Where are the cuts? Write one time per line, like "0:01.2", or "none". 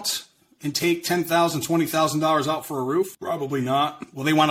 0:03.2